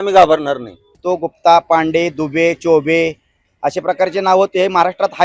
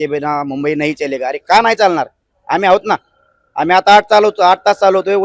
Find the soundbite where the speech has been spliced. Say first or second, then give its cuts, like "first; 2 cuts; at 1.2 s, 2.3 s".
first; 1 cut; at 1.0 s